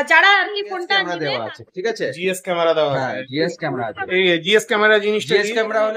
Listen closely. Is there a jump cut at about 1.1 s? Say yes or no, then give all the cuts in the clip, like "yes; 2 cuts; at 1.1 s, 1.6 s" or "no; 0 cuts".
yes; 1 cut; at 1.1 s